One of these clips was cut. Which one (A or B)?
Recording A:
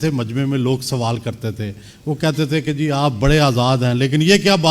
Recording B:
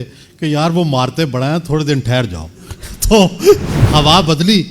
B